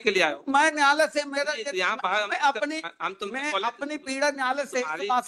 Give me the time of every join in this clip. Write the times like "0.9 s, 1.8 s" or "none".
none